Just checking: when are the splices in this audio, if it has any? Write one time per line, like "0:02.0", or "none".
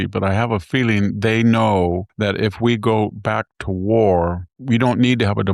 0:02.1
0:04.5